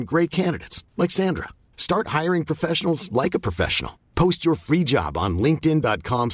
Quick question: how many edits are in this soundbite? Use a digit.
0